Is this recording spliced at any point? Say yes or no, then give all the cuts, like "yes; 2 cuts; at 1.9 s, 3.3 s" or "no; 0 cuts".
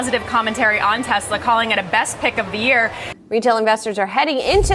yes; 1 cut; at 3.0 s